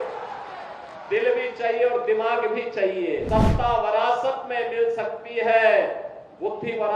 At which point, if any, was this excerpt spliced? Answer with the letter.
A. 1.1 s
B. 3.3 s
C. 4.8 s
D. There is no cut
B